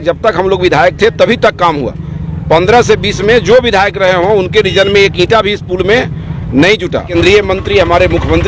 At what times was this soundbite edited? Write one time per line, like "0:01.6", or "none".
0:07.1